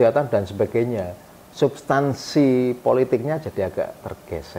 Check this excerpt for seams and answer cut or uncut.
uncut